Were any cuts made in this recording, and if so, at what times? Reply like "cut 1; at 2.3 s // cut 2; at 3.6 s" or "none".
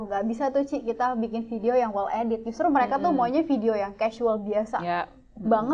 none

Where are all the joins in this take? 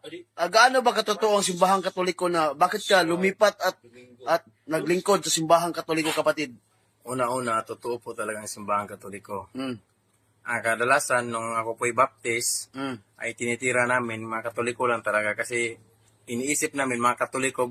none

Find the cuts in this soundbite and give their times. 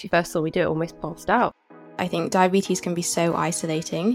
cut 1; at 1.9 s

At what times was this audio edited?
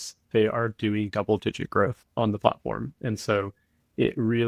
none

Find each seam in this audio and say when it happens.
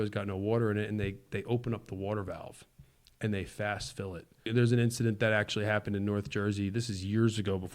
cut 1; at 4.5 s

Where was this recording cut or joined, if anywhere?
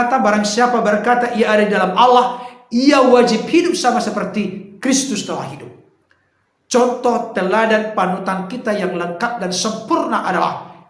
none

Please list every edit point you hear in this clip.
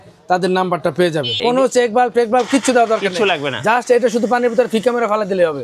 cut 1; at 1.3 s

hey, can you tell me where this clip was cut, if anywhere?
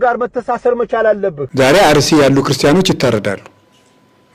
cut 1; at 1.4 s

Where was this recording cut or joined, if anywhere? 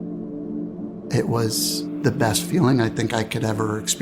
cut 1; at 1.1 s

